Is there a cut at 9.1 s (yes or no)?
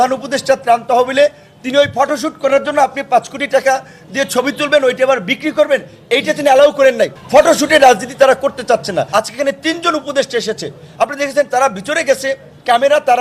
yes